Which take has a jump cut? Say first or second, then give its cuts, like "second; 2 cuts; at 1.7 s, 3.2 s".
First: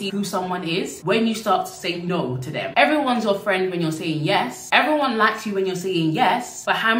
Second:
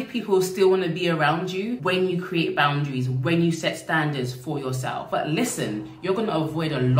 second; 1 cut; at 5.0 s